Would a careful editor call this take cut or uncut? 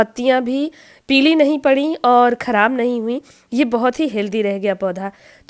uncut